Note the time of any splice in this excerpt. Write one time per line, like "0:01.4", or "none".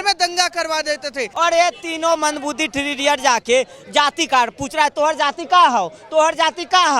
0:01.3

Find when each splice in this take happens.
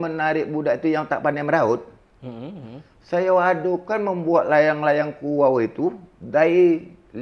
none

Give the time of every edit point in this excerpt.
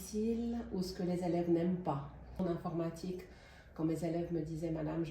0:02.4

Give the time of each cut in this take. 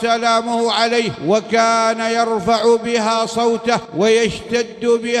0:01.1
0:03.9

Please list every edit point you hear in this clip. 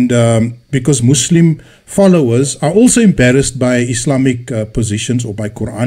0:01.0

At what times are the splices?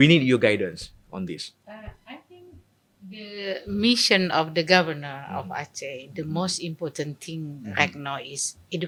none

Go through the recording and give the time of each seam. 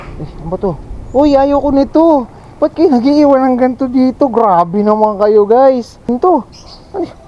0:06.1

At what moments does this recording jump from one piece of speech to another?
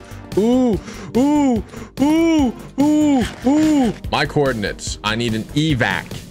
0:04.0

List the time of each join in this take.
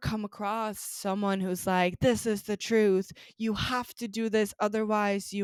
none

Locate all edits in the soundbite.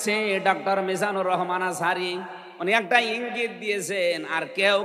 none

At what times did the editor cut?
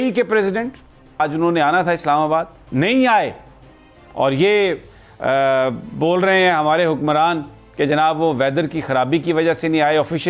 0:01.2

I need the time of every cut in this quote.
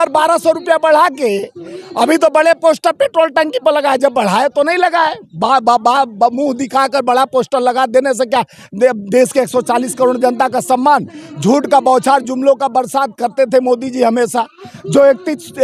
none

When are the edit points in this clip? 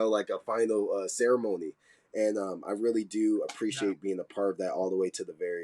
none

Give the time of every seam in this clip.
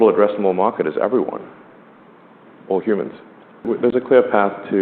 0:03.6

